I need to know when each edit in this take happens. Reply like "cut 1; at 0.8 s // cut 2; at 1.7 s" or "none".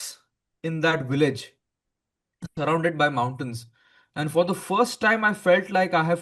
none